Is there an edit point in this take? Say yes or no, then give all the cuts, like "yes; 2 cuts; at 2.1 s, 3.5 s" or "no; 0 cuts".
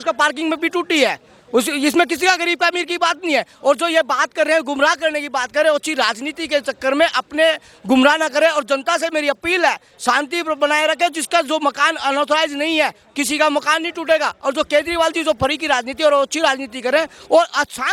no; 0 cuts